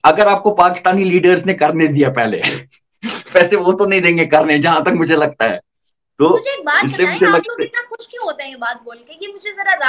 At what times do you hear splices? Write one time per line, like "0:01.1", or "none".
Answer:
none